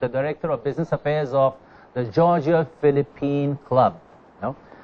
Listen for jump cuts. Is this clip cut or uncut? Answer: cut